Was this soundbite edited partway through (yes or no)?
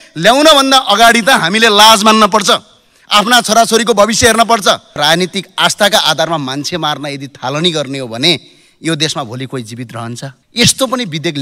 yes